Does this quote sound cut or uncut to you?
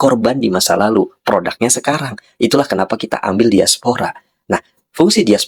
uncut